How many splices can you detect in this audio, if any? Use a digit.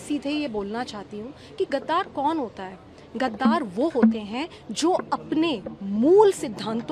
0